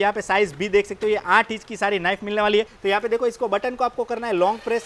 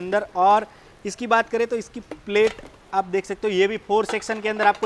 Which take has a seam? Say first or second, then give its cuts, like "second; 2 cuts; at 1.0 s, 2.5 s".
first; 1 cut; at 2.7 s